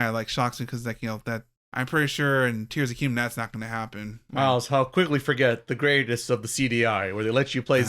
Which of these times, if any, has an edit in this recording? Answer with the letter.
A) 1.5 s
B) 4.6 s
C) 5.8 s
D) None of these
A